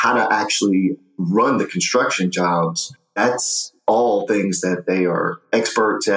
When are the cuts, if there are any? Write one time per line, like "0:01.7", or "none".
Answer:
0:01.0
0:03.1